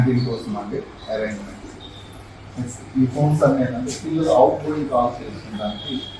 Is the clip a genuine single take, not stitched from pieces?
yes; 0 cuts

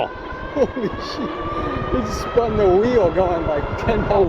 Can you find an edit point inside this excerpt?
no; 0 cuts

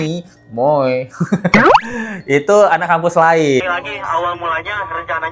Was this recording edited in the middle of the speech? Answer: yes; 1 cut; at 3.6 s

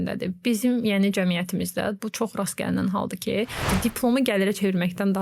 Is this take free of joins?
no; 1 cut; at 3.7 s

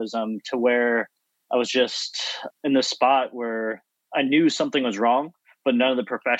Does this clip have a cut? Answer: yes; 1 cut; at 2.4 s

